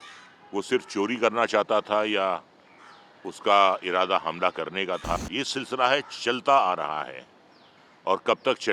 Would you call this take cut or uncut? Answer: cut